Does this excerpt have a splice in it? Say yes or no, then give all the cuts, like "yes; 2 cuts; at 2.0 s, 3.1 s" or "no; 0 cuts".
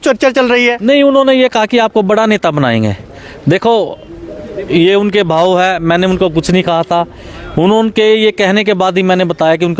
no; 0 cuts